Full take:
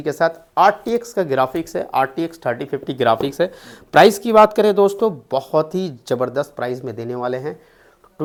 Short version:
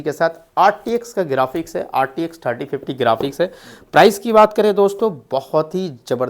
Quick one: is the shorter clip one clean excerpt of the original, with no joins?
yes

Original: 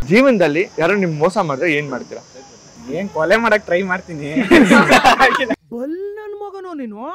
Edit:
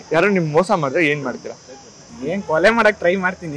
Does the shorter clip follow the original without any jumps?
yes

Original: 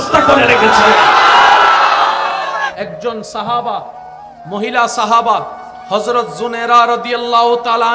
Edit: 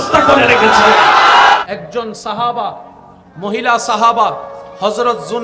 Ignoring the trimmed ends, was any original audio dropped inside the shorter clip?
yes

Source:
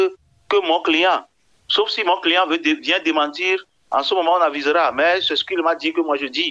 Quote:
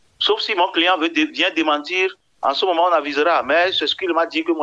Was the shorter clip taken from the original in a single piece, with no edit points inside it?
yes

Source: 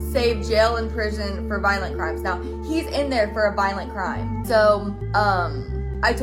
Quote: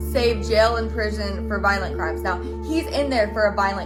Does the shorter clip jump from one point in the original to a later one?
no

